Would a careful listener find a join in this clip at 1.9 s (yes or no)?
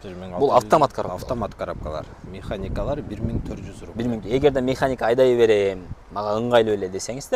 no